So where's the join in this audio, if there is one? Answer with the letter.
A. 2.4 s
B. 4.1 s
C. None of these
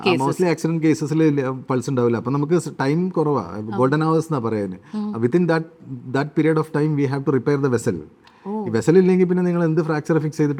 C